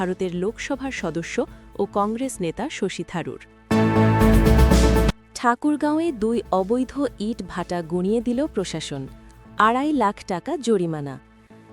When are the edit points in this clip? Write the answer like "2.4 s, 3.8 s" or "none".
3.5 s